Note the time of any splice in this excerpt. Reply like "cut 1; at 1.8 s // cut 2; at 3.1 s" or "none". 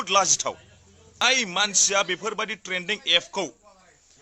cut 1; at 1.2 s